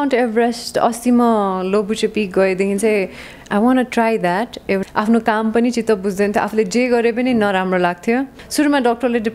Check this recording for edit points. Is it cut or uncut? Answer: cut